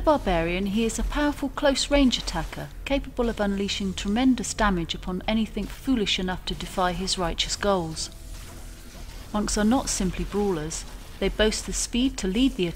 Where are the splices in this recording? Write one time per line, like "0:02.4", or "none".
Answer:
0:06.6